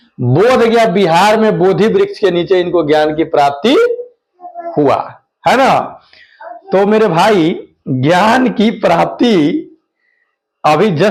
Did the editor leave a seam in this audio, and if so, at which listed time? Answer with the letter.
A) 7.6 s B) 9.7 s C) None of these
C